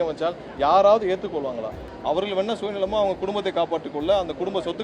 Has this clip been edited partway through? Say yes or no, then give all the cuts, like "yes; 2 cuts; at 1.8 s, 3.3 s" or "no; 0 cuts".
yes; 1 cut; at 1.9 s